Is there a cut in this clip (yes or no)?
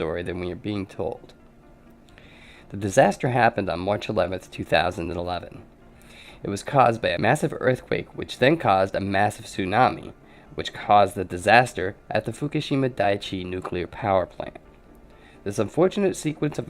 yes